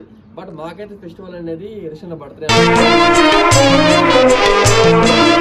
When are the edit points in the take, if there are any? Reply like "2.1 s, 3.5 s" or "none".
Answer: none